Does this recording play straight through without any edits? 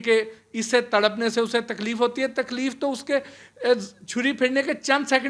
yes; 0 cuts

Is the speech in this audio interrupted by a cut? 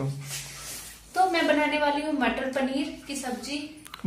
no; 0 cuts

